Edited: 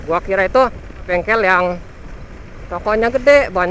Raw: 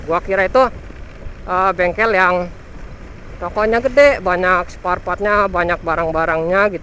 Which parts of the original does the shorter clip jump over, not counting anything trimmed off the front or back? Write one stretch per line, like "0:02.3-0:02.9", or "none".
0:01.1-0:01.8